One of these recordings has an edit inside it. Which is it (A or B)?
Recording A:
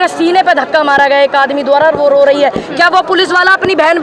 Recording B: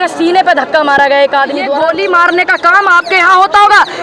B